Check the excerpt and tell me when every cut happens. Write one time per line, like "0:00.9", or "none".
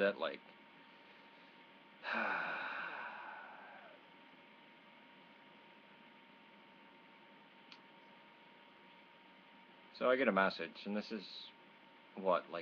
none